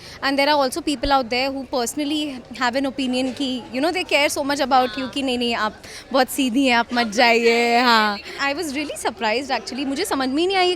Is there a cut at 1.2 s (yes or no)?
no